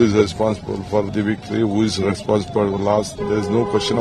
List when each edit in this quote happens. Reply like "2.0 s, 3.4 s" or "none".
1.1 s